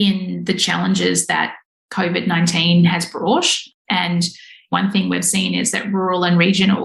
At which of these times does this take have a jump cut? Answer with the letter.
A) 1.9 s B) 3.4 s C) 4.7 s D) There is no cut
C